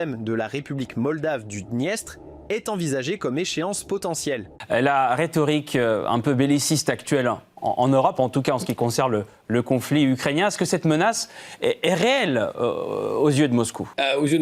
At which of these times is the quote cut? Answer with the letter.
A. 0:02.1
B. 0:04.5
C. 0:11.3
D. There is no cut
B